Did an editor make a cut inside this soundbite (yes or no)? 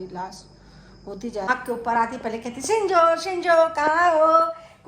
yes